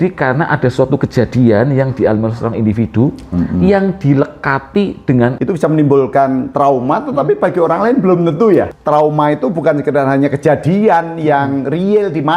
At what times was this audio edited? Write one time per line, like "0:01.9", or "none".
0:05.4
0:08.7

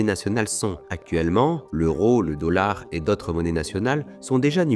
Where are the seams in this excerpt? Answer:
0:01.6

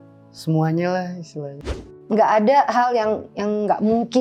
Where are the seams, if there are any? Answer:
0:02.0

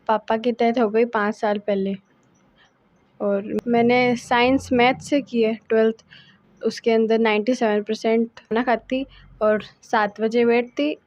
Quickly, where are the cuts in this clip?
0:03.6
0:08.5

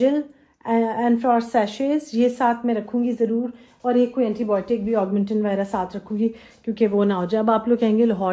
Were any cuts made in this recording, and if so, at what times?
none

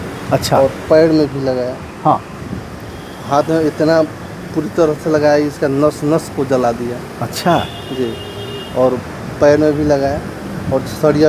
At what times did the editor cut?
none

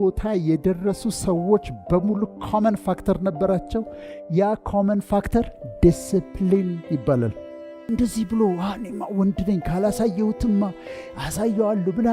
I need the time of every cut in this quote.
0:07.9

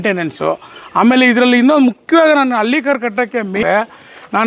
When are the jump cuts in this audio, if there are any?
none

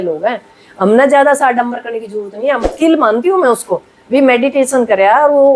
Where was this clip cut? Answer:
0:02.7

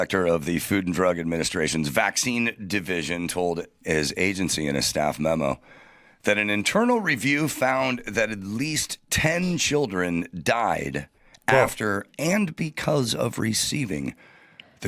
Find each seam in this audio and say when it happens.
none

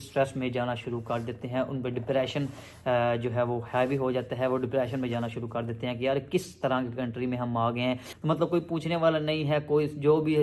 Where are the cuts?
0:08.1

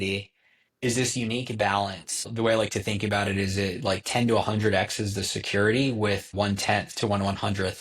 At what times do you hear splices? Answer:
0:02.3
0:06.3

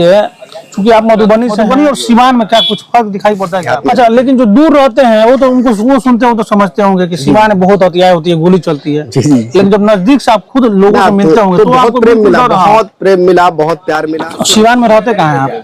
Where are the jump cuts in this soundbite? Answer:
0:01.6
0:03.5
0:14.1

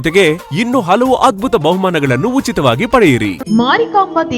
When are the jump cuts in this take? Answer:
0:03.4

